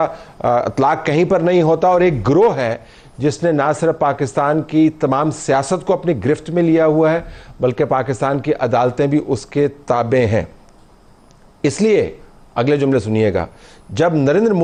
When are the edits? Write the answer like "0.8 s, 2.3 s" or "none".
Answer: none